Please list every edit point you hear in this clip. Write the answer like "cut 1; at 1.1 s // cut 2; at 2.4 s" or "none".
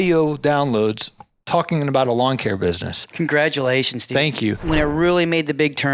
cut 1; at 4.6 s